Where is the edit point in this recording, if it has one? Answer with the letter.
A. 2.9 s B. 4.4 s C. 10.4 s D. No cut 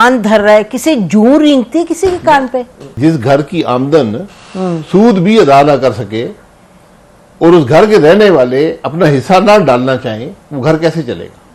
A